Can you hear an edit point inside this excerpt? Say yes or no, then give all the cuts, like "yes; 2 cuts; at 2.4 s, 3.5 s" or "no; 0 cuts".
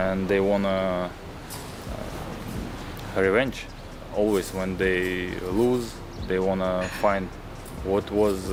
no; 0 cuts